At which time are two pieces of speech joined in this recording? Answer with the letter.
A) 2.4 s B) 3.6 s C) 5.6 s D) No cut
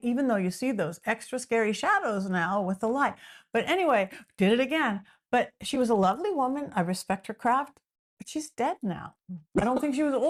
D